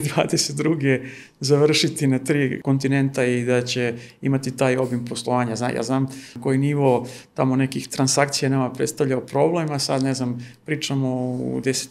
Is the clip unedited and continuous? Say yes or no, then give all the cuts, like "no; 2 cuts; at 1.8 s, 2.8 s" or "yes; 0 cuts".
no; 2 cuts; at 2.6 s, 6.3 s